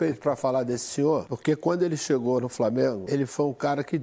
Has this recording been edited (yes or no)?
yes